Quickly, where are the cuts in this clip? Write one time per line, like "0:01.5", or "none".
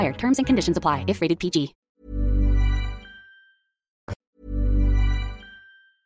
none

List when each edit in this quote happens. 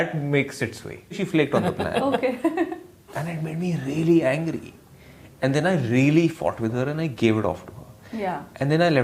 0:01.1

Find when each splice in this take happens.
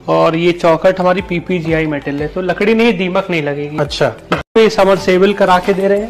0:04.5

